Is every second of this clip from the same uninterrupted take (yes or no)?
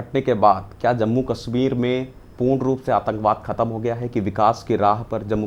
yes